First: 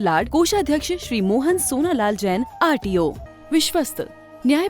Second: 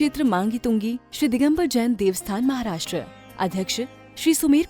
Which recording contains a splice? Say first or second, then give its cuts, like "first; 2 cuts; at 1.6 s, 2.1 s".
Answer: first; 1 cut; at 3.3 s